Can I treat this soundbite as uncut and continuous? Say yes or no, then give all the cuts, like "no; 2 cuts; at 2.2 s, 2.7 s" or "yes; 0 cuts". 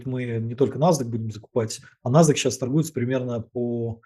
yes; 0 cuts